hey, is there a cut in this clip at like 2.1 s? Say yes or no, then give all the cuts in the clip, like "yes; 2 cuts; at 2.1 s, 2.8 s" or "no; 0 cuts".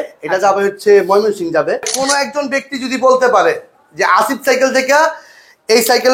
yes; 1 cut; at 2.1 s